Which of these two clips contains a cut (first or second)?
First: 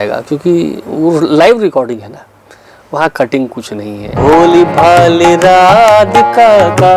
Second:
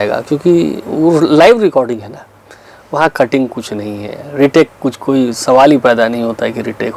first